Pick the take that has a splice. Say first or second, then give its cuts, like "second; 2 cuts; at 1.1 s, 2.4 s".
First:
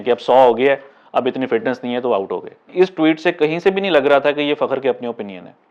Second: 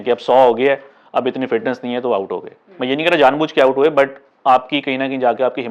first; 1 cut; at 2.7 s